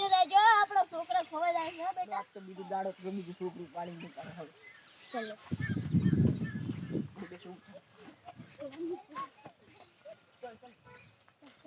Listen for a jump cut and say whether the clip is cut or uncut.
cut